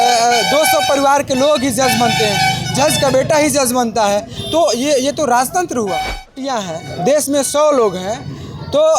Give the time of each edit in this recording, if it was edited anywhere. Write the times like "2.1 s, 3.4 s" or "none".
6.4 s